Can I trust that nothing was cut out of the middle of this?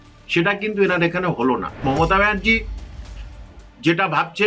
no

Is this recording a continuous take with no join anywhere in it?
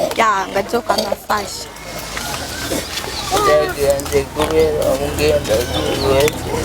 no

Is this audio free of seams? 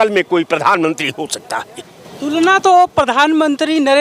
yes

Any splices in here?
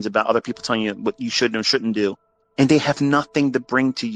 no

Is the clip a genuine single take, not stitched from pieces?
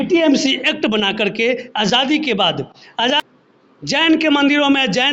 no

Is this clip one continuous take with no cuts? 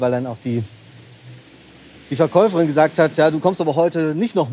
yes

